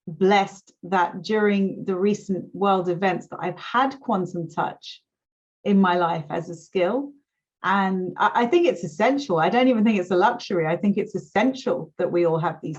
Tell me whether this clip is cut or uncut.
uncut